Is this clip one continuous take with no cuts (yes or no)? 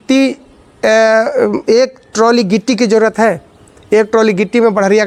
yes